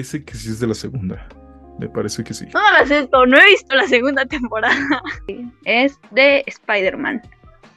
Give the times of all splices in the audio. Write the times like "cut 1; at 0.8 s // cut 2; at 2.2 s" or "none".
cut 1; at 5.3 s